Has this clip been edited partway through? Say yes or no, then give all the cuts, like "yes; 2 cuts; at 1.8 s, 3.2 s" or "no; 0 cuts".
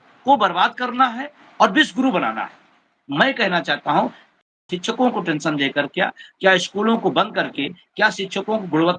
no; 0 cuts